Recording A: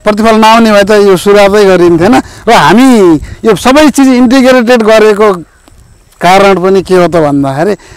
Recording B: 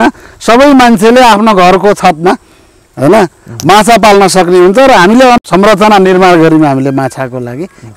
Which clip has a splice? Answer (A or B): B